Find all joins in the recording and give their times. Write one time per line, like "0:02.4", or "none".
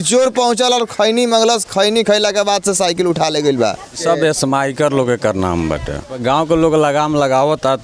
0:03.9
0:06.1